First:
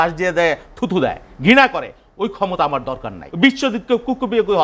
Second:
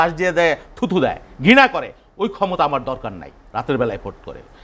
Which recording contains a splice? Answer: first; 1 cut; at 3.2 s

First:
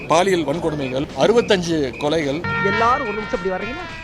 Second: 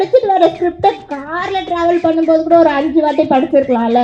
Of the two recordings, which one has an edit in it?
first; 2 cuts; at 1.1 s, 2.5 s

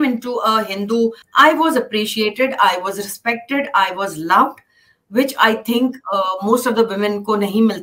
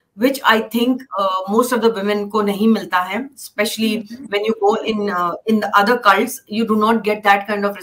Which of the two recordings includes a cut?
first; 1 cut; at 1.2 s

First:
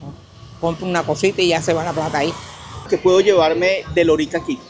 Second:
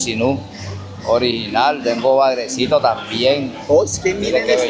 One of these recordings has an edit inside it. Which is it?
first; 1 cut; at 2.9 s

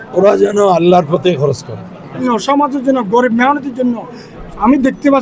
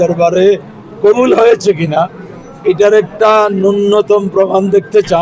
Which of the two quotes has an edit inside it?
first; 1 cut; at 2.3 s

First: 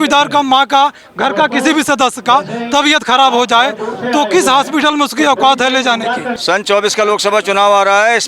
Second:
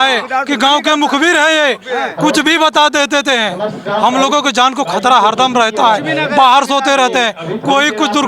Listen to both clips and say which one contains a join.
first; 1 cut; at 6.3 s

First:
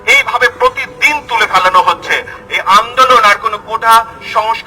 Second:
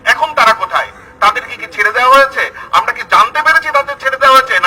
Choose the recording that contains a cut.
first; 1 cut; at 2.3 s

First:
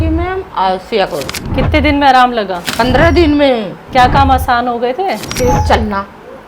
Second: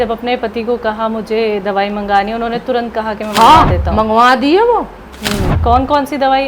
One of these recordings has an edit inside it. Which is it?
first; 4 cuts; at 1.4 s, 2.6 s, 3.8 s, 5.3 s

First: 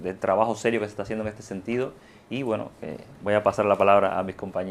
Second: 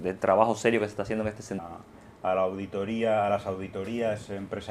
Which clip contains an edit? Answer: first; 1 cut; at 1.6 s

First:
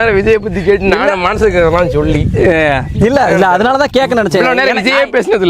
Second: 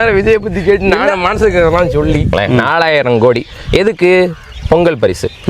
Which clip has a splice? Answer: second; 1 cut; at 2.3 s

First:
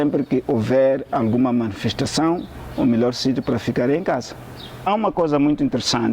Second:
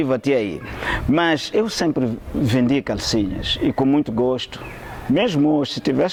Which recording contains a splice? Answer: first; 1 cut; at 4.8 s

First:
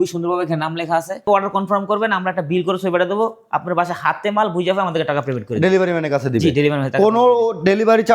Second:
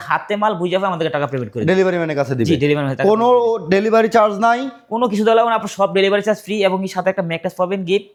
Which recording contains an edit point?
first; 1 cut; at 1.2 s

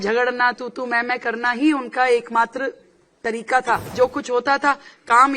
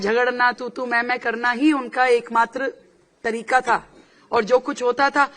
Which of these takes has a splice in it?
first; 1 cut; at 3.9 s

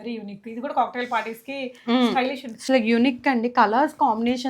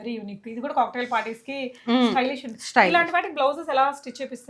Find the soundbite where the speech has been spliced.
first; 1 cut; at 2.6 s

